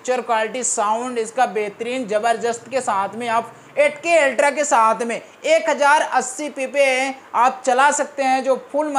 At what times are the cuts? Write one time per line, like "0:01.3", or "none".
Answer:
none